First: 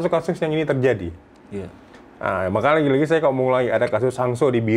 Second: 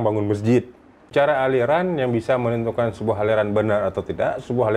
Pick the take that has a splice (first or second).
second